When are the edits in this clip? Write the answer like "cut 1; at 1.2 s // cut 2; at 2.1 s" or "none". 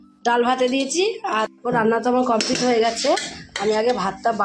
cut 1; at 1.5 s